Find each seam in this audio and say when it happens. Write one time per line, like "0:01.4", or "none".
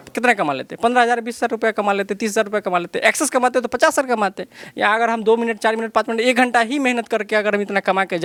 none